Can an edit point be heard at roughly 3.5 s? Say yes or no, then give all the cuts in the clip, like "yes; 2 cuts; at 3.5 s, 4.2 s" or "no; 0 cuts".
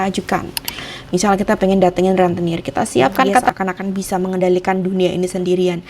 yes; 1 cut; at 3.5 s